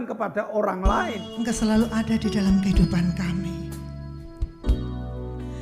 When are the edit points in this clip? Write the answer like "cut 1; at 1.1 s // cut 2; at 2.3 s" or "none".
cut 1; at 1.2 s